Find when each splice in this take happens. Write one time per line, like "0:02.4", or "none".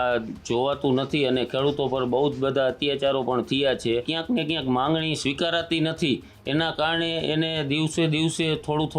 0:04.1